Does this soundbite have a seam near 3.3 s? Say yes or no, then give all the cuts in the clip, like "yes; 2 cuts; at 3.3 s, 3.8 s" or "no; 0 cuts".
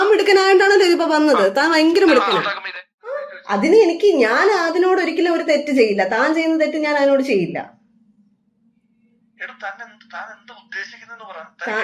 yes; 1 cut; at 3.3 s